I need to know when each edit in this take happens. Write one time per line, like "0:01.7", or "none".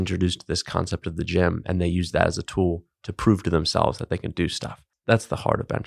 0:04.9